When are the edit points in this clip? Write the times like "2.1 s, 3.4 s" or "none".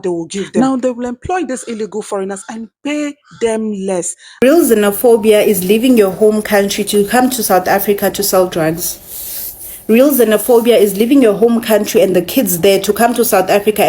4.4 s